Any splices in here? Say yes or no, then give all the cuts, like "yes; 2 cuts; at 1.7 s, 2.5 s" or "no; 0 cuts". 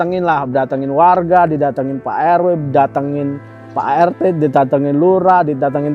no; 0 cuts